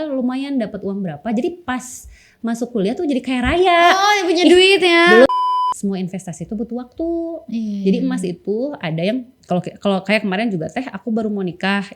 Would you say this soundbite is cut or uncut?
cut